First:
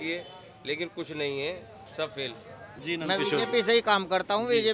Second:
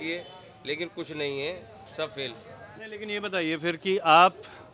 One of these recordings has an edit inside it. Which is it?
first; 1 cut; at 2.8 s

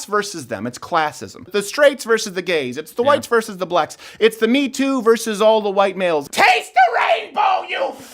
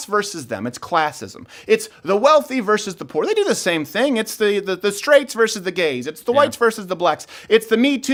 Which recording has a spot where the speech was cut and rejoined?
first; 2 cuts; at 1.5 s, 6.2 s

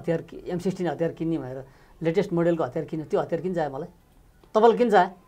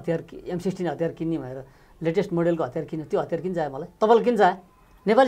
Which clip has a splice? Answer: second; 1 cut; at 3.8 s

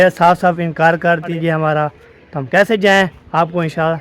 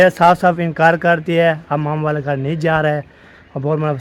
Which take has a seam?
first; 1 cut; at 1.3 s

